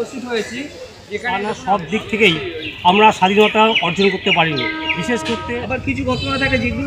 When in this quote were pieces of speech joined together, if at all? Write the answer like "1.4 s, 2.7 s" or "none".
1.3 s, 5.4 s